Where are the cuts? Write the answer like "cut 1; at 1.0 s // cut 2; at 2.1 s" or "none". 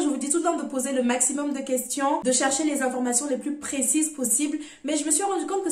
none

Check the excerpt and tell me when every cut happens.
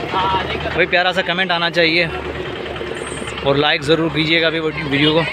none

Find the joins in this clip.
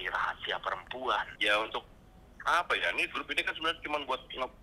cut 1; at 1.2 s

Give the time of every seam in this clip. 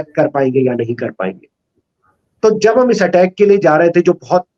none

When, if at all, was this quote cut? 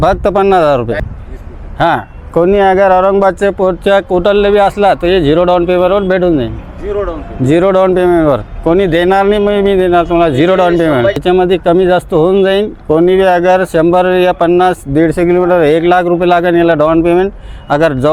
cut 1; at 1.0 s // cut 2; at 11.2 s

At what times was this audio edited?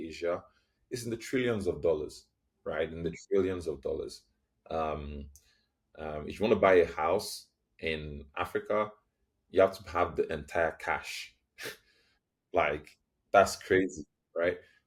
none

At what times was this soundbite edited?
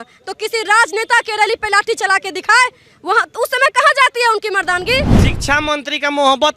cut 1; at 5.2 s

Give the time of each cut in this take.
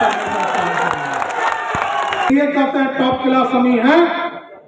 cut 1; at 2.3 s

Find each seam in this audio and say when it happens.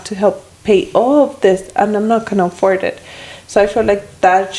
none

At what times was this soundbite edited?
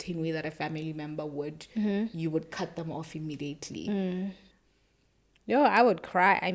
cut 1; at 4.5 s

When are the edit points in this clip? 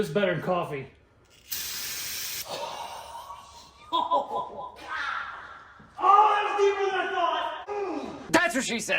cut 1; at 7.6 s

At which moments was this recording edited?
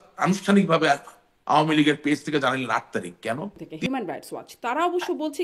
cut 1; at 3.6 s

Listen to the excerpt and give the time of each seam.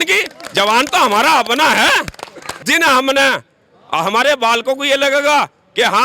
cut 1; at 2.6 s

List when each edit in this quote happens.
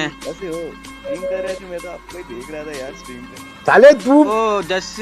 cut 1; at 1.1 s

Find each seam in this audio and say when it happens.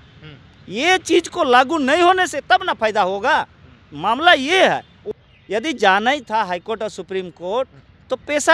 cut 1; at 5.1 s

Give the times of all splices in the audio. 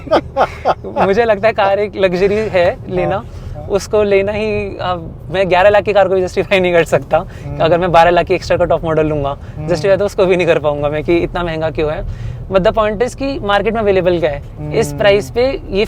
none

